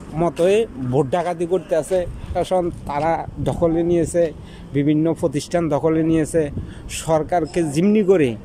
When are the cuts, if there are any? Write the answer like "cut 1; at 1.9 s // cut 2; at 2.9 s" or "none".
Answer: cut 1; at 2.2 s